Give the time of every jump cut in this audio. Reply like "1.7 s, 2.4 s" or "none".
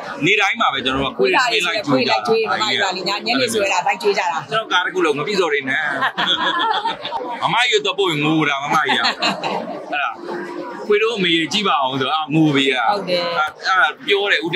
7.2 s